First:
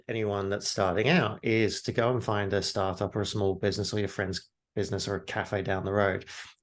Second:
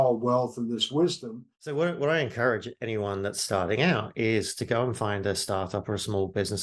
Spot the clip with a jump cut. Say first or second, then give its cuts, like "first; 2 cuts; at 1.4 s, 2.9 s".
second; 1 cut; at 1.6 s